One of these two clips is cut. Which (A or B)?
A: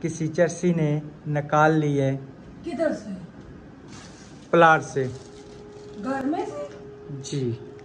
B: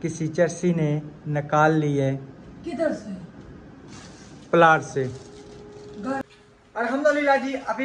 B